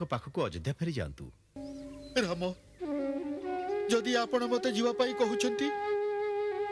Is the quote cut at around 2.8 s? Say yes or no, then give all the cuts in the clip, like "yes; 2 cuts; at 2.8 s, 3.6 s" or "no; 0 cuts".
no; 1 cut; at 1.6 s